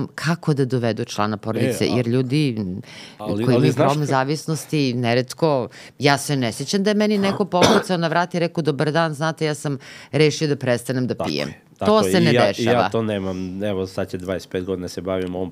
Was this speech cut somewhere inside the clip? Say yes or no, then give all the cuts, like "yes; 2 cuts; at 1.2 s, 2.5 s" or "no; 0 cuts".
no; 0 cuts